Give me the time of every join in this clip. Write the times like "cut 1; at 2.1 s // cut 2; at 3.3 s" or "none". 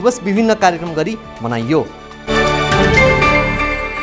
cut 1; at 2.1 s